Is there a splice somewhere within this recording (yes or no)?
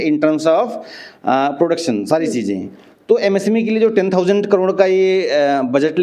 no